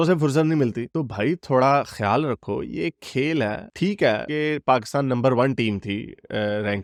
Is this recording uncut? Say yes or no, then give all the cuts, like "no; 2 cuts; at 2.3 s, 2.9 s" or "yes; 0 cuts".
yes; 0 cuts